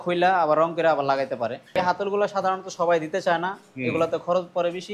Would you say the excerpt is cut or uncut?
cut